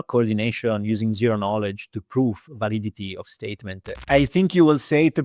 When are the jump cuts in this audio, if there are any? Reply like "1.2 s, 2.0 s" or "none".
4.0 s